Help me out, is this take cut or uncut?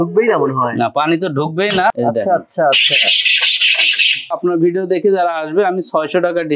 cut